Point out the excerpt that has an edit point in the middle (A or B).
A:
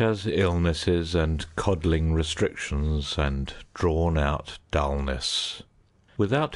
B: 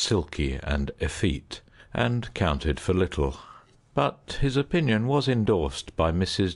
B